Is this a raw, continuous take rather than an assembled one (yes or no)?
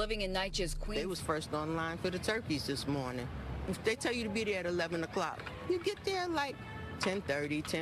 no